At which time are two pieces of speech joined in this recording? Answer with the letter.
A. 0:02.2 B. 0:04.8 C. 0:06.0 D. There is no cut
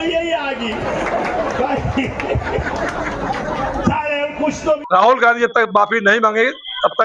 B